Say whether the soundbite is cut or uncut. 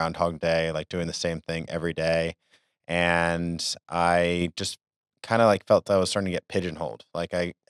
uncut